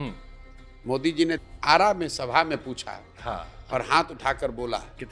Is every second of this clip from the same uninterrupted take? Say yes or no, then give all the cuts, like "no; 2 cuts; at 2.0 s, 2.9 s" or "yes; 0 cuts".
no; 1 cut; at 1.4 s